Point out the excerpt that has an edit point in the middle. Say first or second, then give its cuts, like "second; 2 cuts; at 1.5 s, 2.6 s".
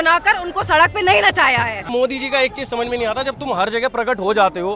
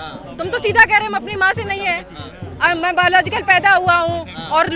first; 1 cut; at 1.9 s